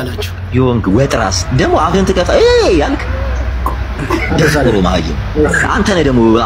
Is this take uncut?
yes; 0 cuts

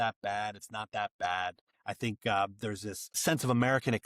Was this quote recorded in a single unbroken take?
no; 1 cut; at 1.7 s

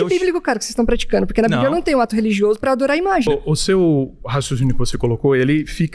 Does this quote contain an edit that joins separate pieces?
yes; 1 cut; at 3.3 s

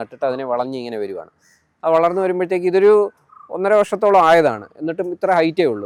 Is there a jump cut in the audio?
no; 0 cuts

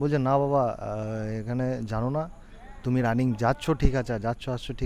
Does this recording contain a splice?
no; 0 cuts

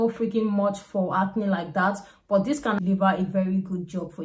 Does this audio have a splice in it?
yes; 1 cut; at 2.8 s

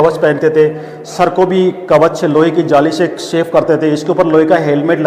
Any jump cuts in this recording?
no; 0 cuts

